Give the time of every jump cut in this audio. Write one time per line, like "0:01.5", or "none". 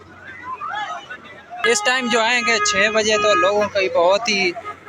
0:01.6